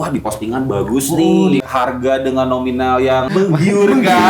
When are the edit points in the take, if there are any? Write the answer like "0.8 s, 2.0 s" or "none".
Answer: 1.6 s, 3.3 s